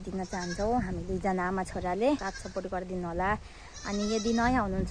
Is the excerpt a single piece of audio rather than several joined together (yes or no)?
no